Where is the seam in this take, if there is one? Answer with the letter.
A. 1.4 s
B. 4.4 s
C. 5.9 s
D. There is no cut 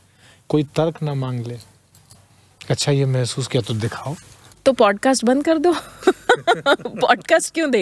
B